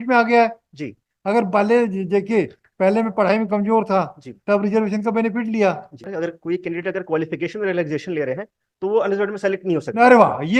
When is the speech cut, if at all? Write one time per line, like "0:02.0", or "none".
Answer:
0:06.1

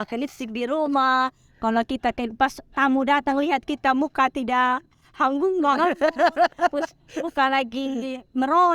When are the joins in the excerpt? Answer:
none

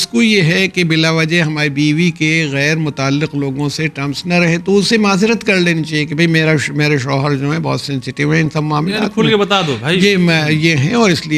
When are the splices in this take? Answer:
none

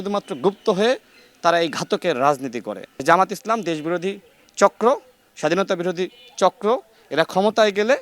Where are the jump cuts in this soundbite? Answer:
0:02.9

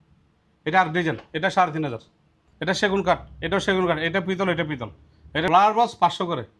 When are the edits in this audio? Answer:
0:02.4
0:05.5

